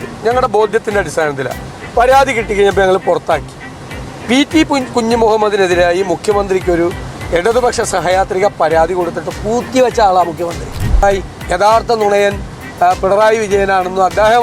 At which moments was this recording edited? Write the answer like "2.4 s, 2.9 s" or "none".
11.0 s